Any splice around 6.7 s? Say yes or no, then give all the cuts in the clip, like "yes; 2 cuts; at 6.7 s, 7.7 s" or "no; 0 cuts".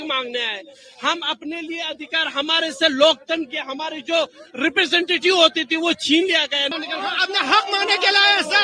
yes; 1 cut; at 6.7 s